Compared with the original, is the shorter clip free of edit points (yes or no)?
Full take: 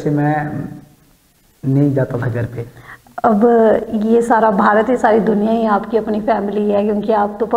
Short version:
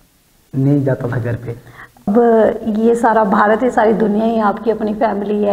no